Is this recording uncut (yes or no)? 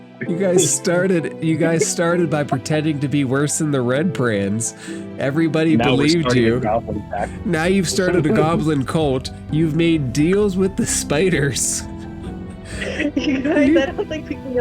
no